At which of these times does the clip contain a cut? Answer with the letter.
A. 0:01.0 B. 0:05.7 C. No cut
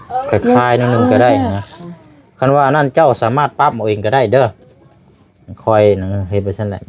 C